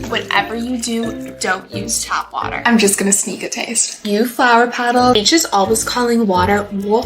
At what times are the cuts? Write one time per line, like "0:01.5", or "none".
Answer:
0:05.1